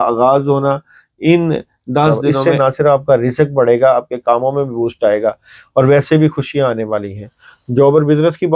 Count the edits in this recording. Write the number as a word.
one